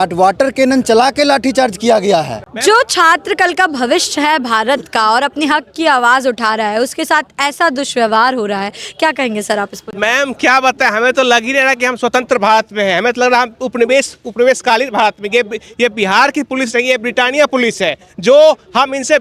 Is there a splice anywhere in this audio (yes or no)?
no